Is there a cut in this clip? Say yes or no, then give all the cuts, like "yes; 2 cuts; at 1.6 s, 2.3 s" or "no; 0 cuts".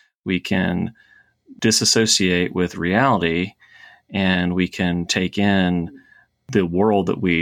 yes; 2 cuts; at 1.5 s, 6.4 s